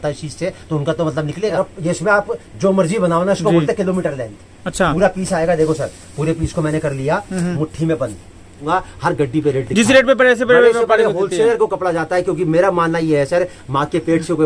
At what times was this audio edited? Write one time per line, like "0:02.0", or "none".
0:01.6
0:08.6